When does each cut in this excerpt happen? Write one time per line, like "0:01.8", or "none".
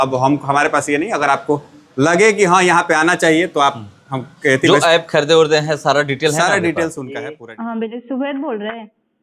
0:07.1